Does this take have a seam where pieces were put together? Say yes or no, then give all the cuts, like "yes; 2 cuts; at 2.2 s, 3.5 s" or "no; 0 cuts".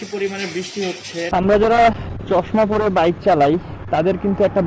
yes; 1 cut; at 1.3 s